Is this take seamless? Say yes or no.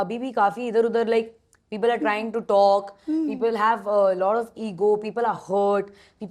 yes